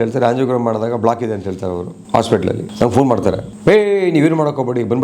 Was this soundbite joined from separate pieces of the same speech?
yes; 3 cuts; at 1.9 s, 2.7 s, 3.5 s

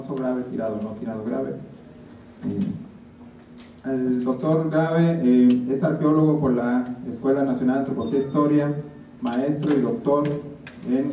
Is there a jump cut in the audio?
no; 0 cuts

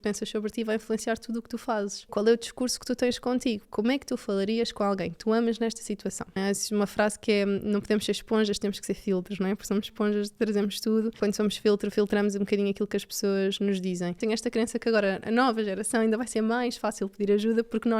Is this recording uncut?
no; 5 cuts; at 2.1 s, 3.7 s, 6.4 s, 11.1 s, 14.2 s

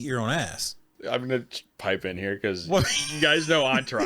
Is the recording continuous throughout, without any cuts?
no; 1 cut; at 0.9 s

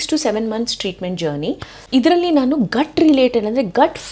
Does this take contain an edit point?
yes; 1 cut; at 1.8 s

